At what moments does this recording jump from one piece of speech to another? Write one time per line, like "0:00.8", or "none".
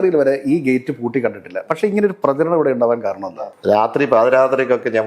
0:03.3